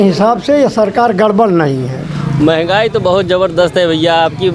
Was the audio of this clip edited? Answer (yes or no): yes